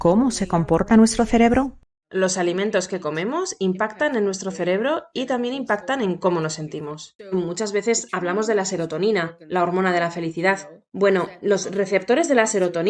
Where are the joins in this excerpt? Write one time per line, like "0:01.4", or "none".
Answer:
0:01.9
0:07.3